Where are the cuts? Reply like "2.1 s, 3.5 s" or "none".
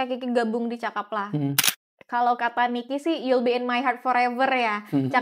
1.6 s